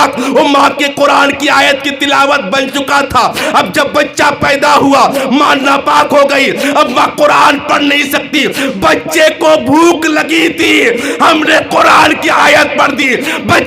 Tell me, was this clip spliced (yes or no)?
no